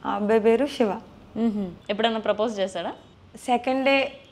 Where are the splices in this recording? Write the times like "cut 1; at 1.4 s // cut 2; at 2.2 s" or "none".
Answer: cut 1; at 1.8 s